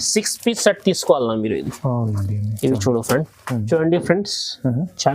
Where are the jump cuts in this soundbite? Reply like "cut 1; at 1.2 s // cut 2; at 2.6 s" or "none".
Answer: cut 1; at 3.7 s